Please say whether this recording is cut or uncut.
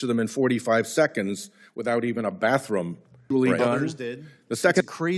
cut